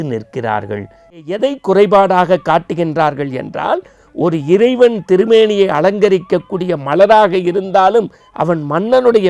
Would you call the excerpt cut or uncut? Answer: cut